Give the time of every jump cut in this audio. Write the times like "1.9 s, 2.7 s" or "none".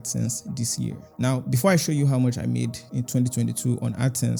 none